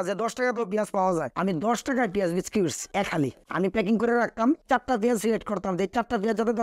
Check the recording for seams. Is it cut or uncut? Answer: uncut